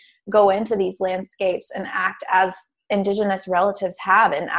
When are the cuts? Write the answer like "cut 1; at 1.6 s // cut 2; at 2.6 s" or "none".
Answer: cut 1; at 2.8 s

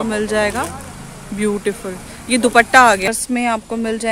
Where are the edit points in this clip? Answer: cut 1; at 3.1 s

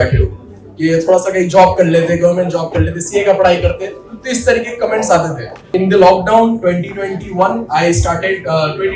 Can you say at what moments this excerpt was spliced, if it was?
cut 1; at 5.6 s

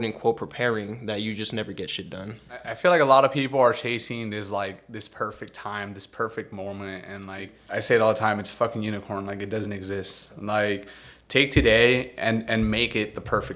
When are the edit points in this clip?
cut 1; at 2.7 s // cut 2; at 7.6 s

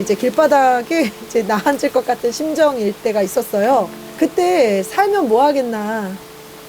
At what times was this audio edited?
cut 1; at 4.0 s

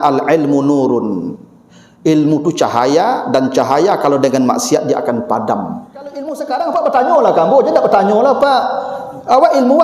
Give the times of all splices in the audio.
cut 1; at 6.3 s

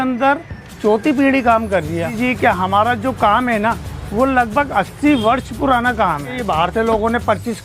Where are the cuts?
cut 1; at 2.1 s // cut 2; at 6.4 s

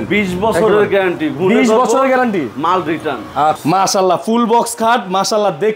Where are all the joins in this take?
cut 1; at 3.6 s

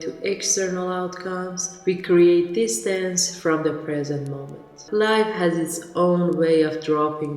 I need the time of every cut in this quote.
cut 1; at 4.8 s

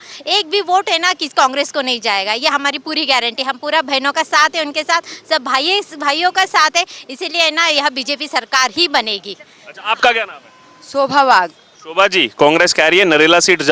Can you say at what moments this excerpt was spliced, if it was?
none

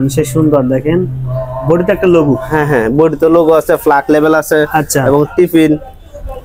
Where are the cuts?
none

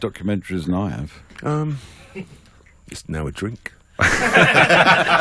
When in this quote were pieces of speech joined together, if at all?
cut 1; at 1.2 s

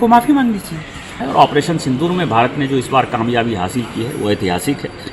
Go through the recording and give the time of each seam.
cut 1; at 1.2 s

